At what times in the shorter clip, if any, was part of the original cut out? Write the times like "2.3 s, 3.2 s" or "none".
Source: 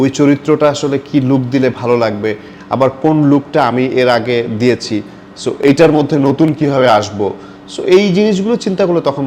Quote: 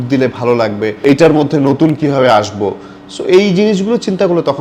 1.0 s